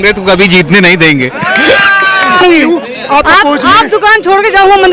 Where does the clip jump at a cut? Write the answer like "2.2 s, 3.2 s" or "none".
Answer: 2.4 s